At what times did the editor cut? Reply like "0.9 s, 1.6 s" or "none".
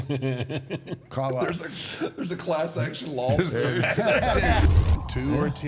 4.6 s